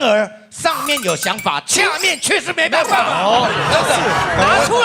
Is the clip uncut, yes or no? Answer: yes